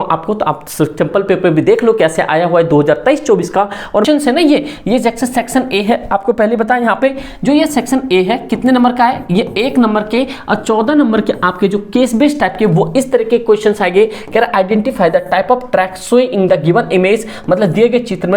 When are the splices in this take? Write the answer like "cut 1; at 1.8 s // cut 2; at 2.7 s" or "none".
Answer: cut 1; at 4.1 s